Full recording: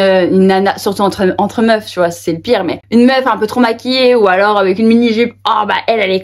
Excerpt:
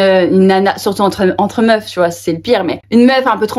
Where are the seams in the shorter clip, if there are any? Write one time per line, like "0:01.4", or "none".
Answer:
none